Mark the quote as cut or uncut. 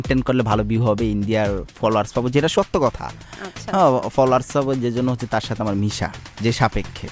uncut